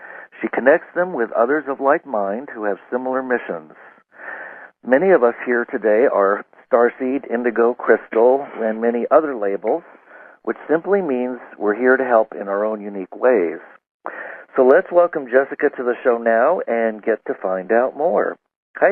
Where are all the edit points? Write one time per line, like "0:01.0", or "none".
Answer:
0:14.9